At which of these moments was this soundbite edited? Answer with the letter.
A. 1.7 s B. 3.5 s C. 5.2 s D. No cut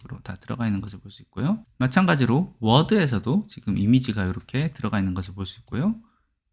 A